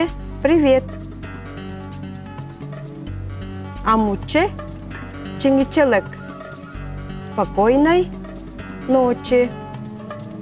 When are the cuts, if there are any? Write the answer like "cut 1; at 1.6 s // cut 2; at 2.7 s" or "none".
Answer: cut 1; at 0.9 s // cut 2; at 3.8 s // cut 3; at 9.5 s